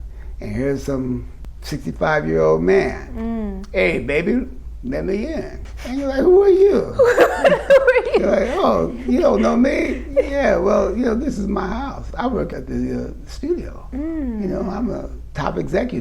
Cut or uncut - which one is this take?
cut